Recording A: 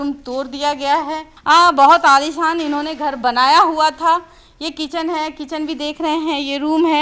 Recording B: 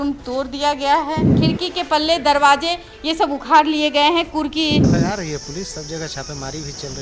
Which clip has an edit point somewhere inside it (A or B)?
B